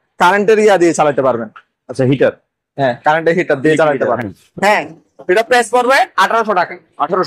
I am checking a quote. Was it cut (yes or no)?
no